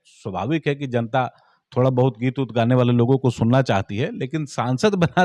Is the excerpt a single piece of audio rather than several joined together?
yes; 0 cuts

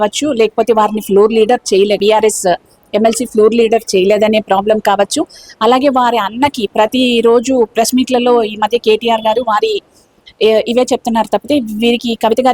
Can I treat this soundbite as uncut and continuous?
no; 1 cut; at 2.0 s

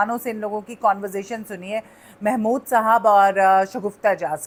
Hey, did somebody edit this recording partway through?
no; 0 cuts

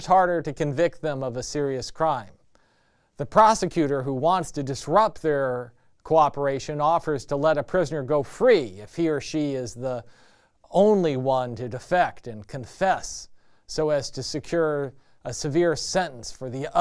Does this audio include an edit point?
no; 0 cuts

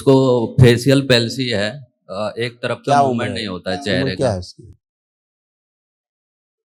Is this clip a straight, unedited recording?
yes; 0 cuts

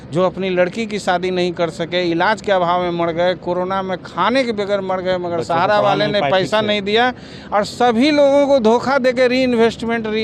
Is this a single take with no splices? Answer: yes; 0 cuts

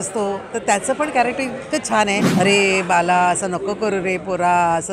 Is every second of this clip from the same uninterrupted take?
no; 1 cut; at 2.3 s

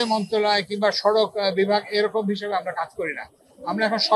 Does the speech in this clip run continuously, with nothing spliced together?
yes; 0 cuts

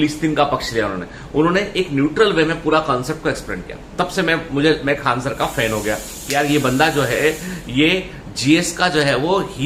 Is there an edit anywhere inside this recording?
no; 0 cuts

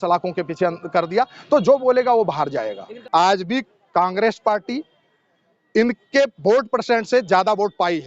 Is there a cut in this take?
yes; 1 cut; at 2.9 s

